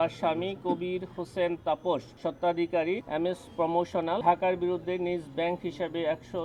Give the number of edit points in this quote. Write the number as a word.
three